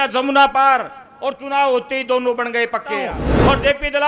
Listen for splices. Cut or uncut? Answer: cut